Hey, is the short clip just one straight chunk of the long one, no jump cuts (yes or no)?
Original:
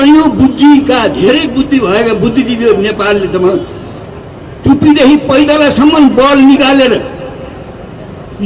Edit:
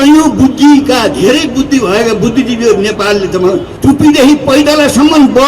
no